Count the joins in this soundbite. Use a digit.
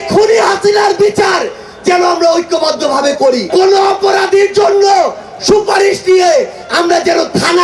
1